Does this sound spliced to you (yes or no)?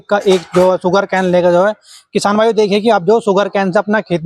no